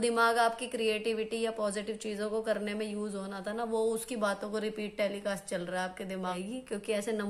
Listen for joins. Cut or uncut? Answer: cut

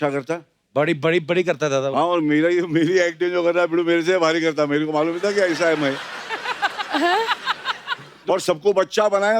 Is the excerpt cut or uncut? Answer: cut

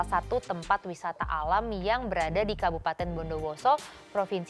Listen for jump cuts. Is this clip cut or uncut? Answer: uncut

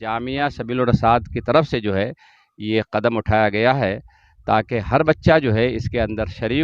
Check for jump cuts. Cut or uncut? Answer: uncut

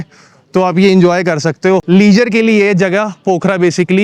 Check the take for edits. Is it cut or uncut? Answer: cut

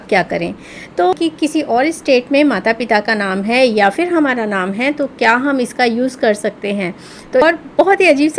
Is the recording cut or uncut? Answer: cut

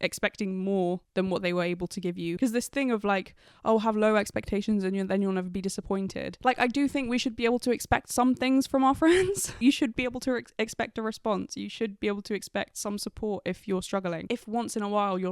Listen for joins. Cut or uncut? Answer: cut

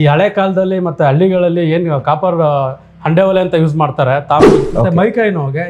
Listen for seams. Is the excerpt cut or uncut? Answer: cut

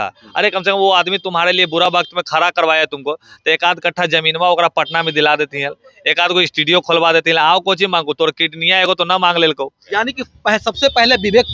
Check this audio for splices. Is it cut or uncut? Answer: cut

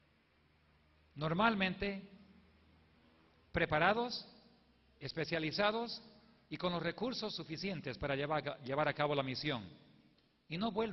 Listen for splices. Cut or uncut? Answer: uncut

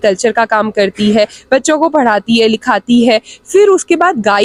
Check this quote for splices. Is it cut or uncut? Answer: uncut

